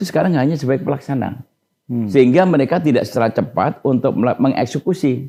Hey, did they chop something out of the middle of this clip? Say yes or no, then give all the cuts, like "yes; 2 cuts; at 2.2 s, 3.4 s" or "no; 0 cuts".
no; 0 cuts